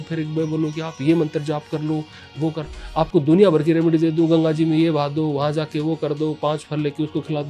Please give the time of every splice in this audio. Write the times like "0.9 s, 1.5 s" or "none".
none